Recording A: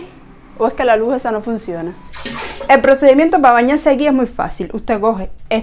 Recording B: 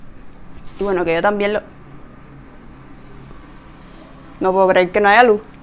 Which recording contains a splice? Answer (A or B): A